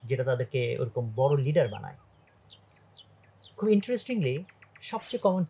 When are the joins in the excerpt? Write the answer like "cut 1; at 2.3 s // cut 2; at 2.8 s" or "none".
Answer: none